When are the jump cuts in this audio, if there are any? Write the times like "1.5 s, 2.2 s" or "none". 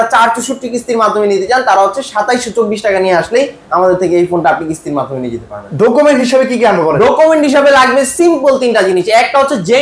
none